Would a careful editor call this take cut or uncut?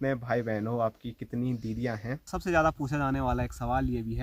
cut